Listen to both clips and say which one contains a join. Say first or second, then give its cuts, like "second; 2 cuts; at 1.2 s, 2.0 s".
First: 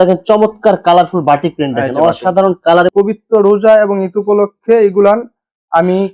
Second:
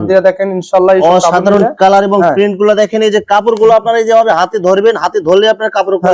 first; 1 cut; at 2.9 s